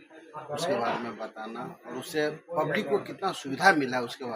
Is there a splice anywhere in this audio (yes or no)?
no